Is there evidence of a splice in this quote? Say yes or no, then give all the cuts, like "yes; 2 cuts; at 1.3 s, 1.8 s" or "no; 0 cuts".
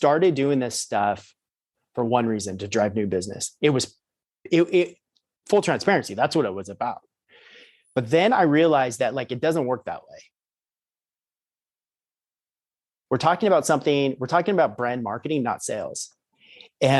no; 0 cuts